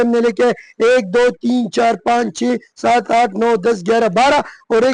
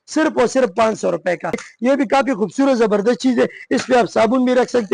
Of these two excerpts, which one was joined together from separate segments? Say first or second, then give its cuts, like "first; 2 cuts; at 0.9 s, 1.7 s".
second; 1 cut; at 1.7 s